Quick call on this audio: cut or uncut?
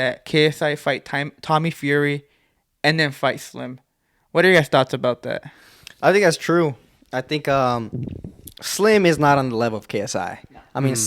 uncut